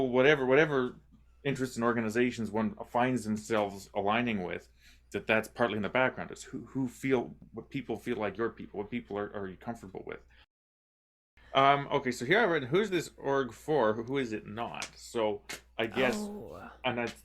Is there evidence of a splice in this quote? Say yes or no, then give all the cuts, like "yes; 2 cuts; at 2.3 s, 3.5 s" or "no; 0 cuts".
yes; 1 cut; at 10.8 s